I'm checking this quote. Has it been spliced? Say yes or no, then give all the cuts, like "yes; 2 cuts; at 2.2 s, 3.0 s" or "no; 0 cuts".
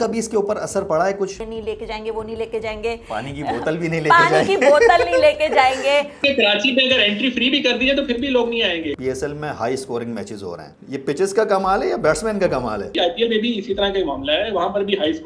yes; 4 cuts; at 1.3 s, 6.2 s, 8.9 s, 12.9 s